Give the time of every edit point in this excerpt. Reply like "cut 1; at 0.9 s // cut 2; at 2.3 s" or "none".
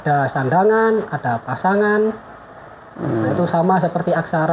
none